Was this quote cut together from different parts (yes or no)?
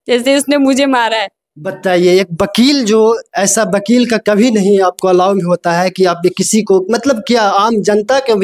no